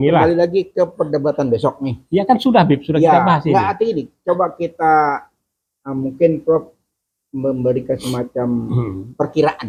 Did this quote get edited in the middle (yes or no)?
no